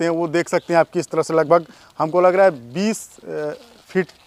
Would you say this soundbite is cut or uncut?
uncut